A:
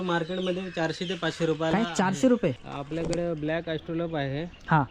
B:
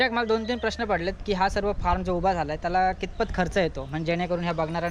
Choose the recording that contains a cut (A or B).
A